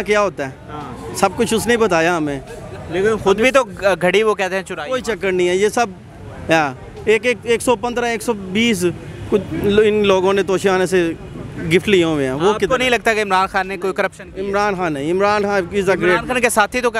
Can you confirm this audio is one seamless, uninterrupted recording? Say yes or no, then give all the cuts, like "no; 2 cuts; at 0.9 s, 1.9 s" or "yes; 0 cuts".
yes; 0 cuts